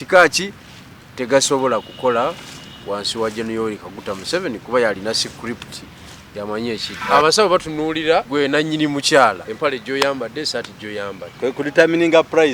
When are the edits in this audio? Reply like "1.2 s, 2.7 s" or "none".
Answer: 6.9 s, 8.3 s, 9.5 s